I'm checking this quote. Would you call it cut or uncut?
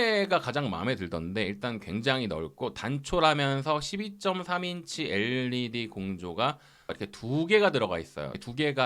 uncut